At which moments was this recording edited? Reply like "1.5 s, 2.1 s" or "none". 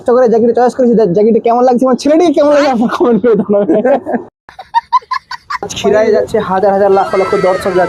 4.3 s, 5.7 s